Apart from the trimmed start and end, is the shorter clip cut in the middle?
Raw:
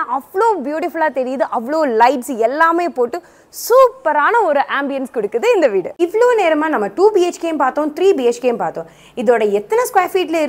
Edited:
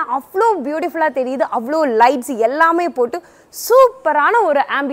no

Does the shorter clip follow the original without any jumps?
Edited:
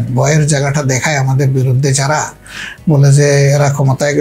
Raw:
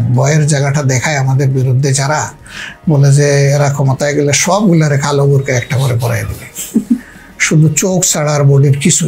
yes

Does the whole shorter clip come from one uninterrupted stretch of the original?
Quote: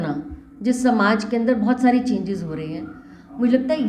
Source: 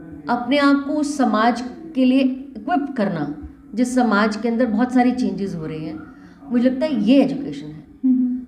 yes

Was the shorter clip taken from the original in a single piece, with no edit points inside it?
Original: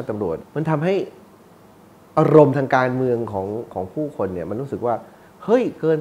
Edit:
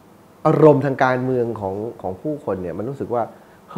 yes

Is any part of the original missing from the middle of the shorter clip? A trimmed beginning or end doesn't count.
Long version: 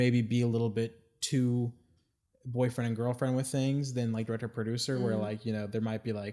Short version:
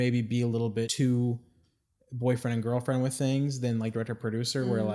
yes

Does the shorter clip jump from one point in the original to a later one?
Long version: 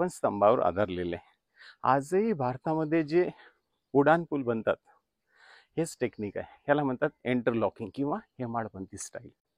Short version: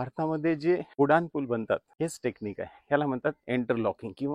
yes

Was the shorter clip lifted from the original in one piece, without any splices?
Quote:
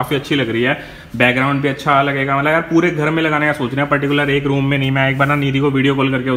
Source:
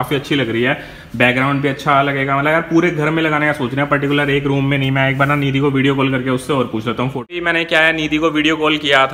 yes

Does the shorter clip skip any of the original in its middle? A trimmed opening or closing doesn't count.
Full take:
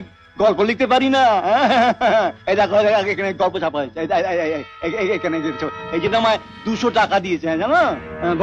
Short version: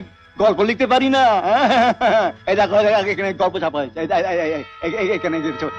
no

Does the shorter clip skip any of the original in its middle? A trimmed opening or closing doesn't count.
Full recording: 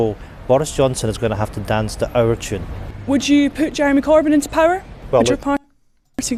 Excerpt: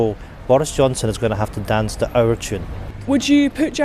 no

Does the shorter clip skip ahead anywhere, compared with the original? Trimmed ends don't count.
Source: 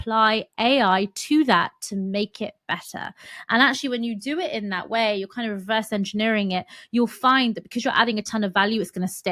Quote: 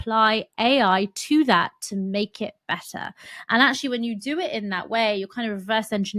no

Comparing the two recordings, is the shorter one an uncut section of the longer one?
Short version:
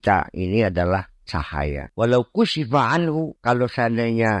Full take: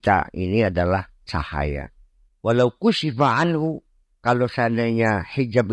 no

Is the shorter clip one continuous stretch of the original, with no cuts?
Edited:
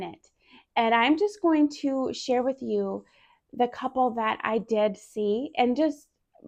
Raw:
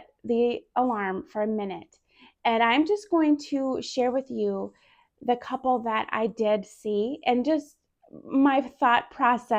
yes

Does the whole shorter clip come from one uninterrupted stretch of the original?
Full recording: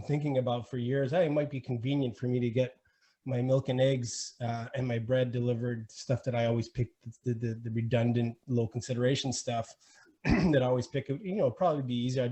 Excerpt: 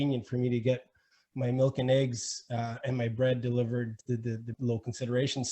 no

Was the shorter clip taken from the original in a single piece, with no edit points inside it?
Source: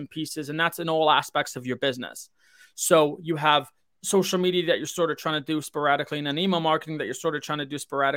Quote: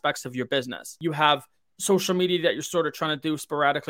no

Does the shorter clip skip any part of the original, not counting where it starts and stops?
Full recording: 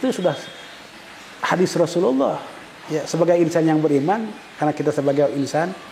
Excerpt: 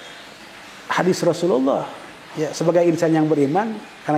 no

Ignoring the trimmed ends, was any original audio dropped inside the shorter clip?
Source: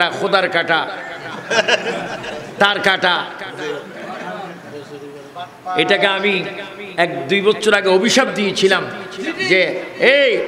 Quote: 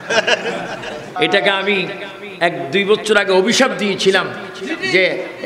yes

